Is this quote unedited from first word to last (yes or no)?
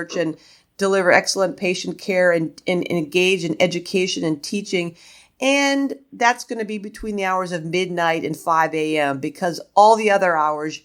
yes